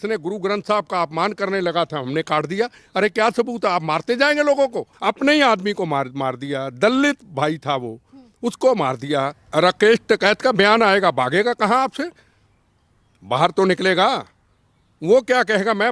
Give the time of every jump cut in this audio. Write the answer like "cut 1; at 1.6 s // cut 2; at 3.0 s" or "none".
cut 1; at 4.9 s // cut 2; at 9.4 s